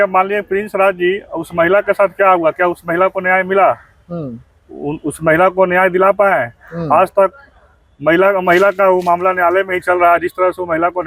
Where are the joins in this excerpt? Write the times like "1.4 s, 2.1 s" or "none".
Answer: none